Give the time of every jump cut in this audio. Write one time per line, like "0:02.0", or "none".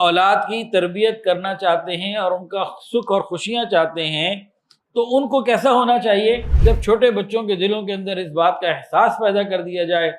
0:06.5